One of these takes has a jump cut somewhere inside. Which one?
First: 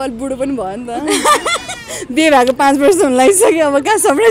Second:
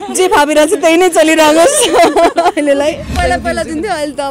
second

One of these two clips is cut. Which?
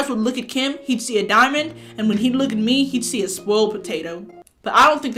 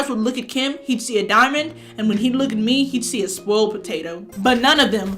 second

